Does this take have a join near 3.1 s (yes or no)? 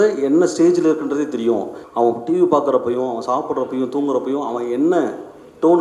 no